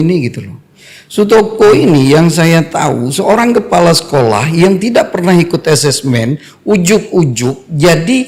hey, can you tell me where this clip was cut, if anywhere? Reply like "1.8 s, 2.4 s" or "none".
none